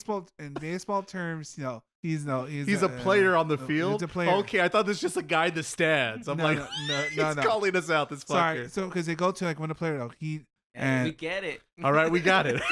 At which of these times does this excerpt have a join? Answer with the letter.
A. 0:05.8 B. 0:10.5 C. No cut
B